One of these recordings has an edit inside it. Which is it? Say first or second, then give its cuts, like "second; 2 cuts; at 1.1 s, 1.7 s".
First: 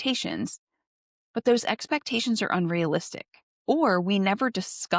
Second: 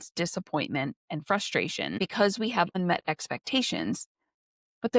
second; 2 cuts; at 1.0 s, 2.0 s